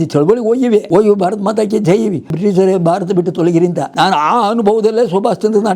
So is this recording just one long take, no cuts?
no; 3 cuts; at 0.8 s, 2.3 s, 3.8 s

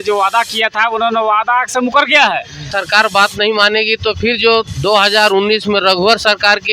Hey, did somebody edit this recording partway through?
yes; 1 cut; at 2.7 s

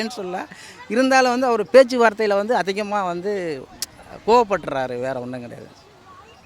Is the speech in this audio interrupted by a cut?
no; 0 cuts

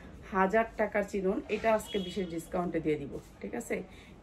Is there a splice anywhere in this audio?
no; 0 cuts

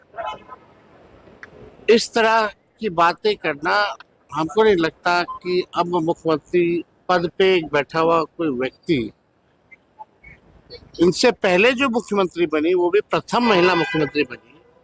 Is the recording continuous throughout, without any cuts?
yes; 0 cuts

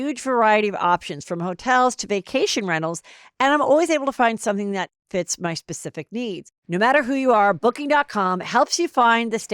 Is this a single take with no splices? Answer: no; 1 cut; at 6.5 s

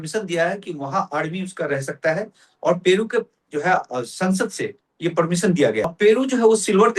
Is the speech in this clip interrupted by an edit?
yes; 1 cut; at 5.9 s

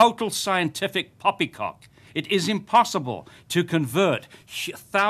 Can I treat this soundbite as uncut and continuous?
yes; 0 cuts

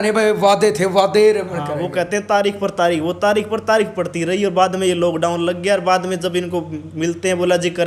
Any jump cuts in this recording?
no; 0 cuts

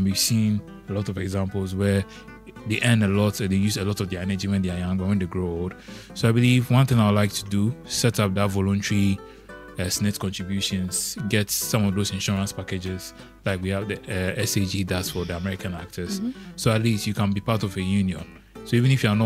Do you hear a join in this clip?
no; 0 cuts

